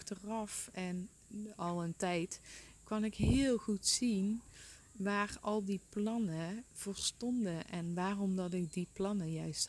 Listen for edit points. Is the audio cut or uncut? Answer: uncut